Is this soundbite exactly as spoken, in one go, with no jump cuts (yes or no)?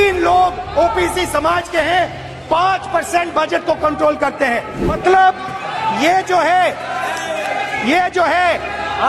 no